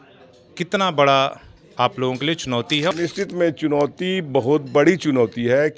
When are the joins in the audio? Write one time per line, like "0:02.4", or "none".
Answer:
0:02.9